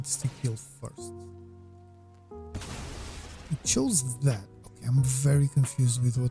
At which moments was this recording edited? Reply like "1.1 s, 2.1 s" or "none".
0.9 s, 2.5 s